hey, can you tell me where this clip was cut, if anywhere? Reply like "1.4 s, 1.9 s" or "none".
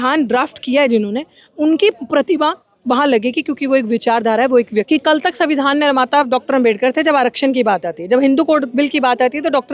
4.9 s